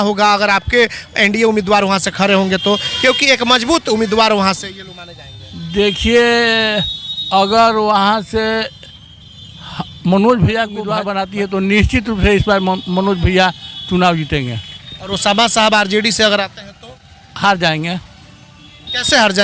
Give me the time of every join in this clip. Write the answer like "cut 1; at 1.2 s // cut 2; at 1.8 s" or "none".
cut 1; at 11.0 s

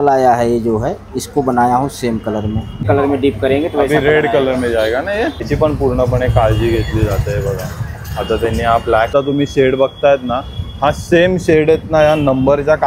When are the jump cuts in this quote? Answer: cut 1; at 2.8 s // cut 2; at 5.5 s // cut 3; at 9.1 s

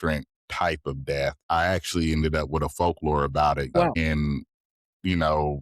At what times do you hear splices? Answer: cut 1; at 1.4 s // cut 2; at 3.9 s

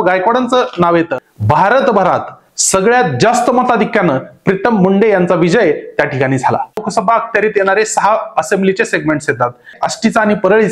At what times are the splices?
cut 1; at 1.2 s // cut 2; at 6.8 s // cut 3; at 9.8 s

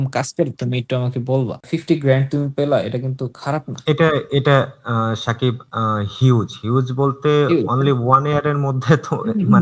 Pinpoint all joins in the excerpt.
cut 1; at 1.7 s

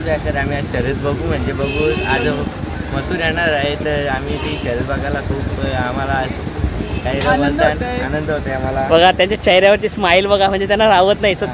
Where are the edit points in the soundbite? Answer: none

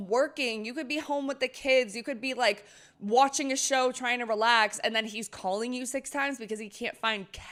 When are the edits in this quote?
none

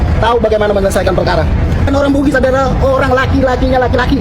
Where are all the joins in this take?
cut 1; at 1.9 s

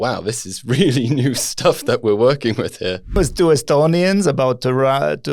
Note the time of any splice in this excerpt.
cut 1; at 3.2 s

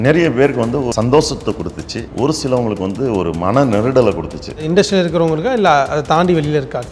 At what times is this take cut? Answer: cut 1; at 0.9 s // cut 2; at 2.0 s // cut 3; at 4.6 s

